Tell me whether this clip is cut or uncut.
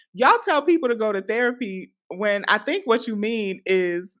uncut